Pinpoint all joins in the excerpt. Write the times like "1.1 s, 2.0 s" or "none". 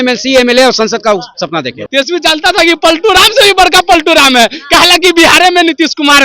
1.8 s